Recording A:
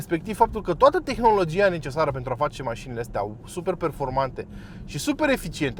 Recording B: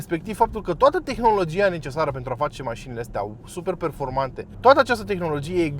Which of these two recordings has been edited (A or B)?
B